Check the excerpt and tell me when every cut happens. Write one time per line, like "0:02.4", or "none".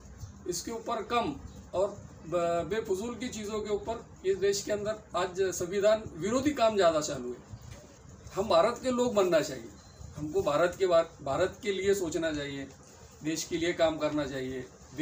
0:08.0